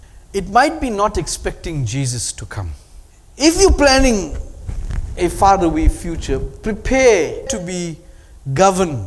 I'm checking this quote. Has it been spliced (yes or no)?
yes